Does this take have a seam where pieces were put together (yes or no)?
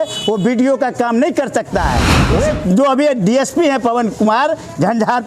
yes